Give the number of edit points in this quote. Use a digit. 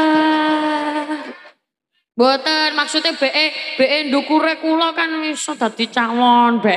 0